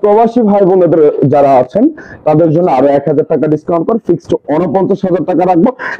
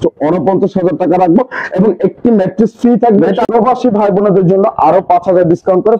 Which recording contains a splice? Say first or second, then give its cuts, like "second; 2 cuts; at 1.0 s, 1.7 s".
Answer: second; 1 cut; at 3.4 s